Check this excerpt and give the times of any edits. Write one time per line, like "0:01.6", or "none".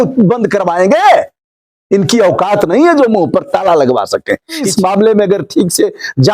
0:04.7